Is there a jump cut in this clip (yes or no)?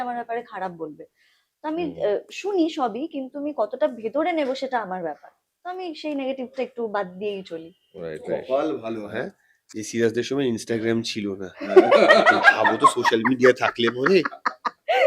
no